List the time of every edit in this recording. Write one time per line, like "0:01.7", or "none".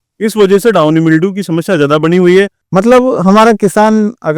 0:02.6